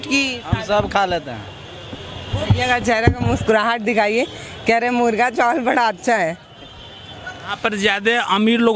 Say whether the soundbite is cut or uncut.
cut